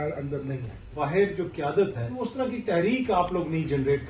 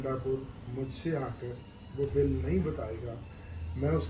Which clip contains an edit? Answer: first; 2 cuts; at 0.9 s, 2.2 s

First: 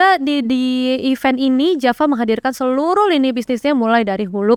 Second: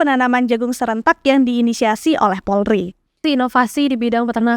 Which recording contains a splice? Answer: second; 1 cut; at 3.2 s

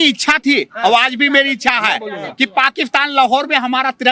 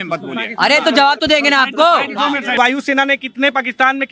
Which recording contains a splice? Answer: second; 1 cut; at 2.6 s

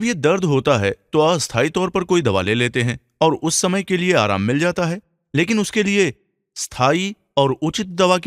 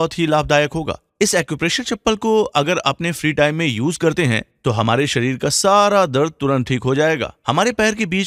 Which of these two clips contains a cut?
first; 1 cut; at 1.0 s

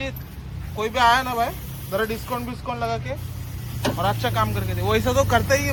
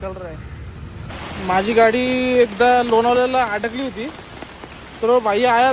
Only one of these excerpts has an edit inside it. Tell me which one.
second; 1 cut; at 1.1 s

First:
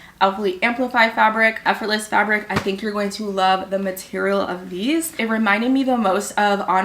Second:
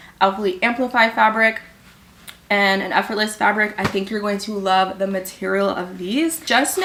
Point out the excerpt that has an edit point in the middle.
first; 2 cuts; at 1.6 s, 5.1 s

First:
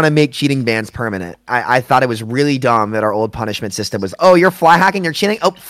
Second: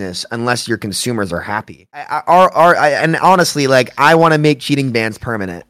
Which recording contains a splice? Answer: second; 1 cut; at 2.0 s

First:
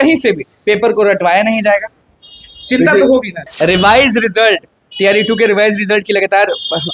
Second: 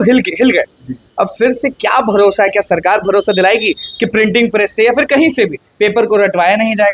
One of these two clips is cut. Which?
first; 1 cut; at 3.5 s

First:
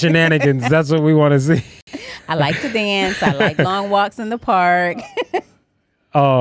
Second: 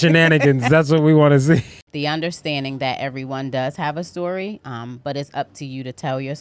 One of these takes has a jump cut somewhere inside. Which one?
second; 1 cut; at 1.8 s

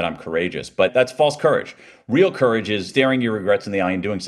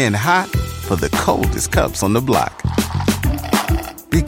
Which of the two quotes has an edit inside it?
first; 2 cuts; at 0.9 s, 2.9 s

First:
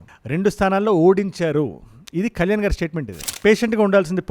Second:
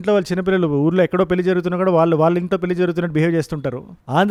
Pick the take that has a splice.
first; 1 cut; at 3.2 s

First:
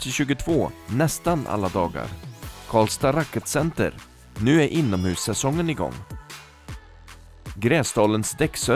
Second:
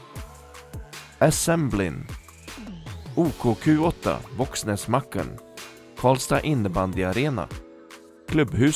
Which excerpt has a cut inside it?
second; 1 cut; at 1.1 s

